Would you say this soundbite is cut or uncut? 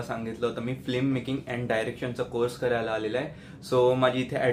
uncut